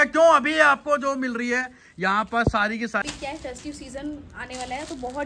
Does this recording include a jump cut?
yes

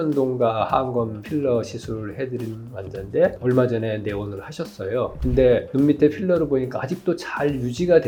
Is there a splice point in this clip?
no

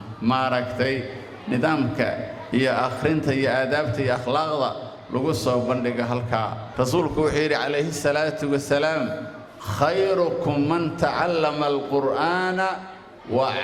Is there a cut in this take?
yes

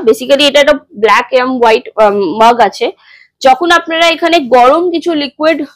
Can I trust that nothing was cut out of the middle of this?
yes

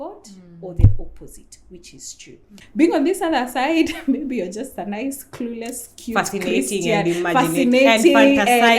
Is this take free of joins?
no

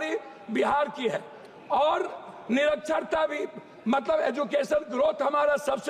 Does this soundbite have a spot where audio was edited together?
no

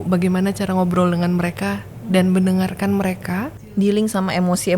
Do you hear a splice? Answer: yes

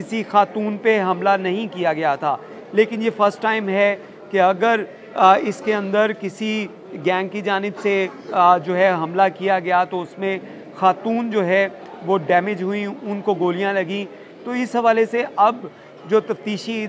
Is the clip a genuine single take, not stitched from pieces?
yes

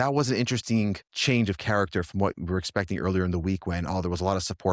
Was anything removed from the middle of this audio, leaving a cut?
yes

